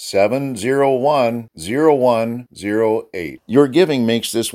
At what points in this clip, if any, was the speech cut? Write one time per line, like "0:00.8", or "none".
none